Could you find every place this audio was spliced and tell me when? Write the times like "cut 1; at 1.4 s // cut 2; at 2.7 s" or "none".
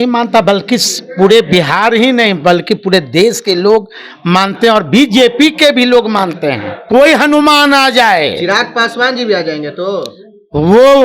cut 1; at 6.7 s